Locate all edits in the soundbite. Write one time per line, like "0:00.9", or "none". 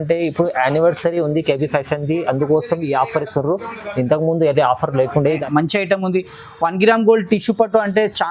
0:05.4